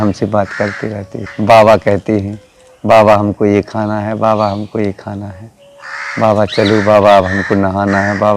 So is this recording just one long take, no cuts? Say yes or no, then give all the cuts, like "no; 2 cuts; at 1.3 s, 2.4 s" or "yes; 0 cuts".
no; 1 cut; at 1.2 s